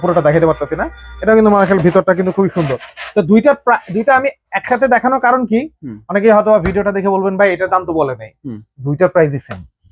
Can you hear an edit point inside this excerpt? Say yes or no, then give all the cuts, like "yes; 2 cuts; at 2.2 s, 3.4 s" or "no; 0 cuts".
no; 0 cuts